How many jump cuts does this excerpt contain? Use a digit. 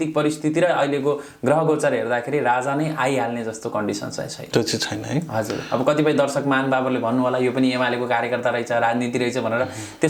0